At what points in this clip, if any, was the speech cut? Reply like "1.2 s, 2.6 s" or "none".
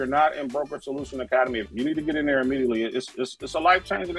1.6 s